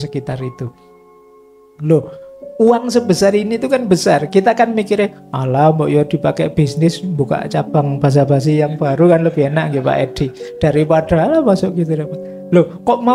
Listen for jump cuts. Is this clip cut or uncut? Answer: uncut